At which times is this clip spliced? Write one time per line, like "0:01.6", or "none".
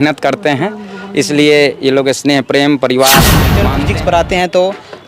0:03.6